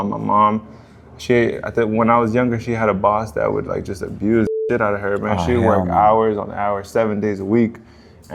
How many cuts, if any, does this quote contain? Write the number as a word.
zero